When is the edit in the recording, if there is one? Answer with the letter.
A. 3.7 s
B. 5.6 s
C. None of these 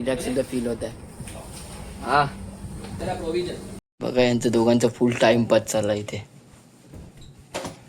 A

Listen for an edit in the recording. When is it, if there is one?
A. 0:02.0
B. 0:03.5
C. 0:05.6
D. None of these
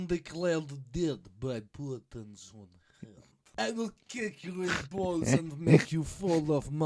B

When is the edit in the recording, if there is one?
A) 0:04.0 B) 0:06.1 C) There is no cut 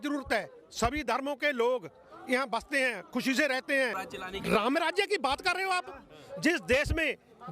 A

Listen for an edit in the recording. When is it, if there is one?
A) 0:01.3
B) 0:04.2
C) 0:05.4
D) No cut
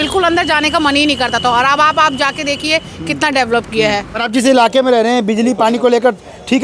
B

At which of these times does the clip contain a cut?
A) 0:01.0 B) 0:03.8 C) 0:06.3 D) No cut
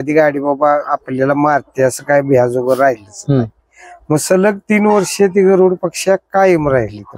D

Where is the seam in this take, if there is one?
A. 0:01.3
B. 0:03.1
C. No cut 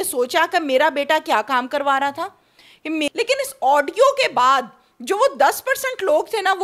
B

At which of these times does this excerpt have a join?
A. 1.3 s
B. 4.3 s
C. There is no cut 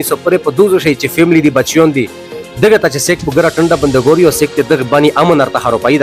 C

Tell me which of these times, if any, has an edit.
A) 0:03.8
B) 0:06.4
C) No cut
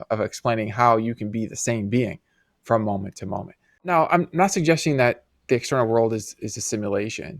A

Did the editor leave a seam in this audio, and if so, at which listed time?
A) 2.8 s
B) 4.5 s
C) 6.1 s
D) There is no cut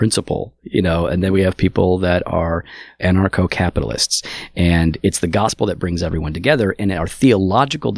A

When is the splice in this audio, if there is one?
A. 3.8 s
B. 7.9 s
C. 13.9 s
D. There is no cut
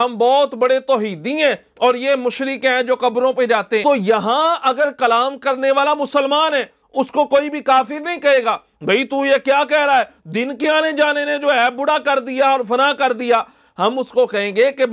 A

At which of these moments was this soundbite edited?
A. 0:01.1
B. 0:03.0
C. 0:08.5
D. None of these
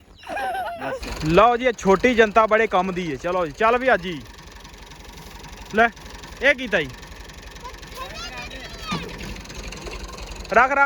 A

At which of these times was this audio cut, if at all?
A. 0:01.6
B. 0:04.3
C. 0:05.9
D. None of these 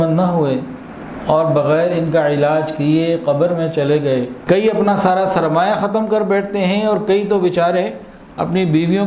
B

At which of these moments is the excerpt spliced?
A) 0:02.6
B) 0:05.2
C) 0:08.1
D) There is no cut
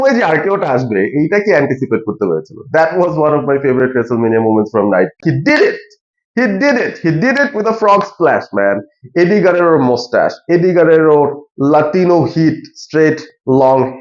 B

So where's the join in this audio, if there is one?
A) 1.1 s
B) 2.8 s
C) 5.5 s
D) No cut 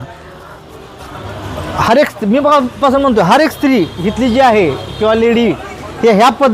D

